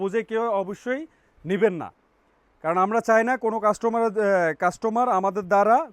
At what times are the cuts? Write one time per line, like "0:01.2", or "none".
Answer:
none